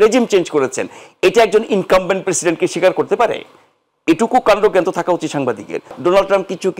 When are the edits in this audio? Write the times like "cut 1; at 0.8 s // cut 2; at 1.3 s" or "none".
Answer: cut 1; at 5.9 s